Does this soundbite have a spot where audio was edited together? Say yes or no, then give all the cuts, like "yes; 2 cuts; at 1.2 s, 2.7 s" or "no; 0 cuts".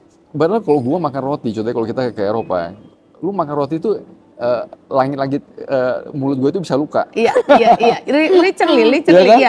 no; 0 cuts